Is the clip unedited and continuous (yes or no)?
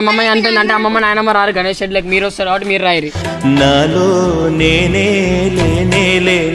no